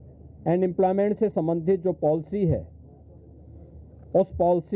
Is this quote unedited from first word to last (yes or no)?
yes